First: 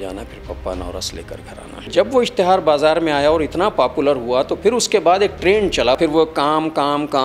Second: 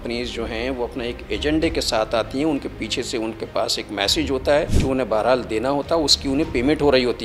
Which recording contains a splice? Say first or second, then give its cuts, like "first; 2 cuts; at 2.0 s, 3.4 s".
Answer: first; 2 cuts; at 1.7 s, 6.0 s